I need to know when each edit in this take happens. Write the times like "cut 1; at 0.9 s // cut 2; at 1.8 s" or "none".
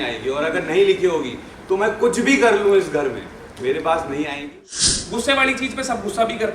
cut 1; at 4.6 s